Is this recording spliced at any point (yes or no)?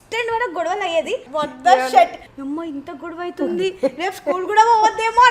yes